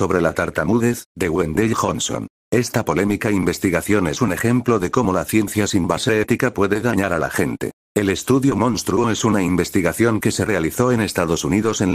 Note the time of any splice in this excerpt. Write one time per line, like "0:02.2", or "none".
0:07.8

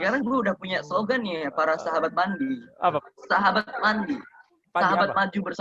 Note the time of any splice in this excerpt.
0:03.0

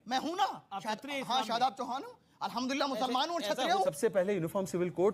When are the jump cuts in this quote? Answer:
0:03.9

